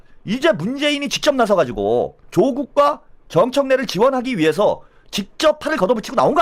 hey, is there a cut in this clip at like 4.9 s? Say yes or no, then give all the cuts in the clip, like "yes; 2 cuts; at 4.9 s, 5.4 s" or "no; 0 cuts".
no; 1 cut; at 2.2 s